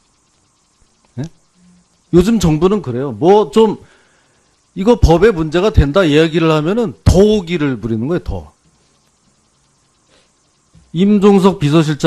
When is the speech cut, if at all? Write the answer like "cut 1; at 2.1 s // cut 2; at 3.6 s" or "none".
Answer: cut 1; at 5.1 s